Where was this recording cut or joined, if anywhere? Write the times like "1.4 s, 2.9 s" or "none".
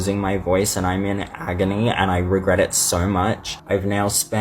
3.5 s